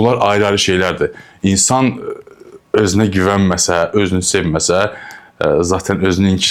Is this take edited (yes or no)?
no